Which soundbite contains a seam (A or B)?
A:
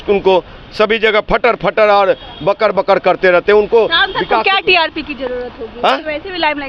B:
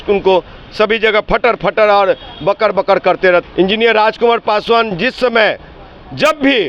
B